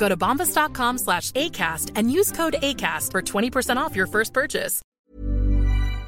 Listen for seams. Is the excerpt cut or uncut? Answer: cut